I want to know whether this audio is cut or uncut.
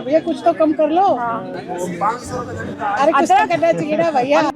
uncut